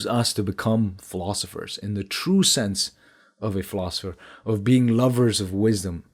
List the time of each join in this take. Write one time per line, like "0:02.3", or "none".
none